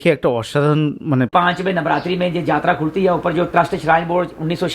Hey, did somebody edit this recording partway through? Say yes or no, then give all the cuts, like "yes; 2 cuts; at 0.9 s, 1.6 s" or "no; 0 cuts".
yes; 1 cut; at 1.3 s